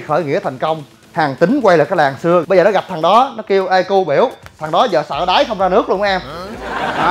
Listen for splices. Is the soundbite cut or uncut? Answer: cut